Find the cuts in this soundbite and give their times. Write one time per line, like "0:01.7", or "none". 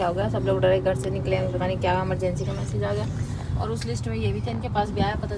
none

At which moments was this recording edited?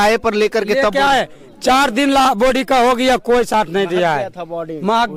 none

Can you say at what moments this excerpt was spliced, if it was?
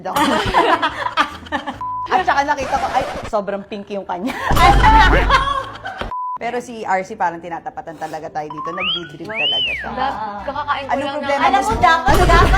0:06.4

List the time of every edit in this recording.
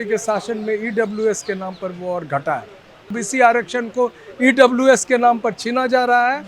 0:03.2

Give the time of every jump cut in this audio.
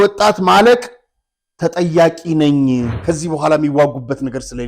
0:02.9

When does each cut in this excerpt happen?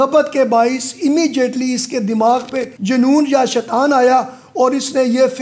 none

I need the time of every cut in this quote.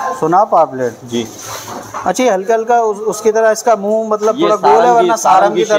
none

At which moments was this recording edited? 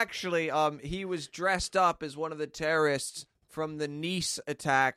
0:02.5

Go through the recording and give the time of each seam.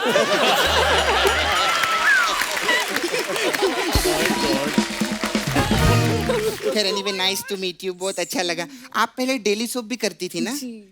0:06.4

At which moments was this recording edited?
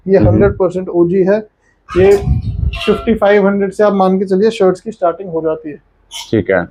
none

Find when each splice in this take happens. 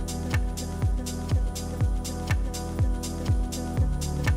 none

